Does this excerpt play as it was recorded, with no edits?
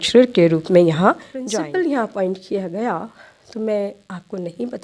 no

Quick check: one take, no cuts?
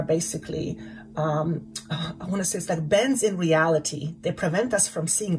yes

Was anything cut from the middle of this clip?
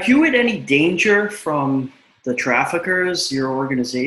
no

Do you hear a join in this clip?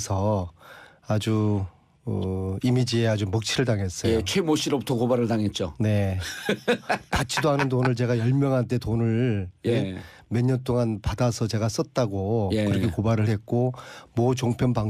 yes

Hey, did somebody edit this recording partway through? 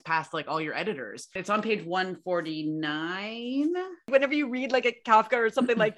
yes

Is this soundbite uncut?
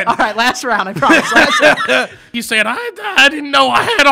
no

